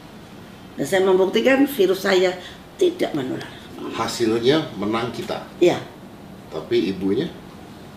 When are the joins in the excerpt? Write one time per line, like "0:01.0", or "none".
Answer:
0:03.8